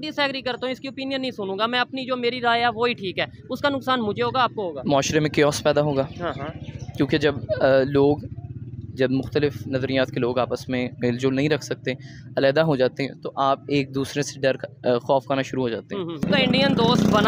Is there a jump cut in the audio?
yes; 1 cut; at 16.2 s

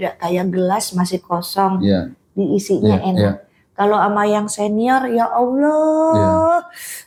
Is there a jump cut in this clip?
no; 0 cuts

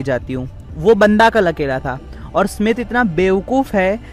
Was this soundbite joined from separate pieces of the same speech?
no; 0 cuts

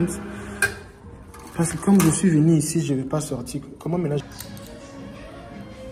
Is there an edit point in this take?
yes; 1 cut; at 4.2 s

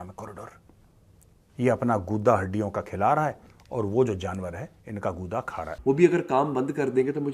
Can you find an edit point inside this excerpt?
yes; 1 cut; at 5.7 s

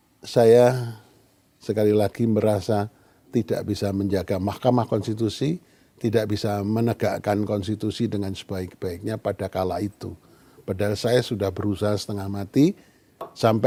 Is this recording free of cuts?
yes; 0 cuts

